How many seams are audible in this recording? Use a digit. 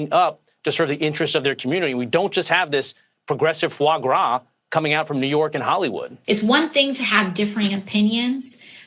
1